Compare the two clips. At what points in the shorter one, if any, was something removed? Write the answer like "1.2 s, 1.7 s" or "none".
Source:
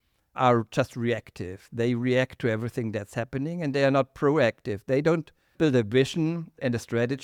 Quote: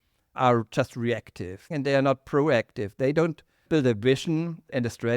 1.7 s